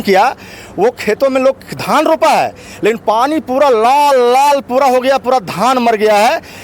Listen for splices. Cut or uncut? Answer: uncut